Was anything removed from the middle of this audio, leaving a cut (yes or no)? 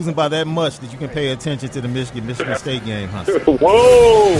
no